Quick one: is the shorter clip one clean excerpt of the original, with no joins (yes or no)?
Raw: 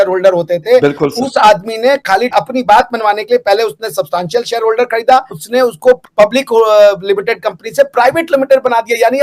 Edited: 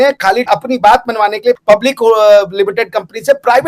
no